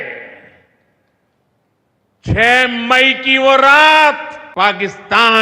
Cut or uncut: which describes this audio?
cut